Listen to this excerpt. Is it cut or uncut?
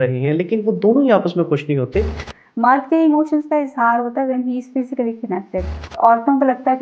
cut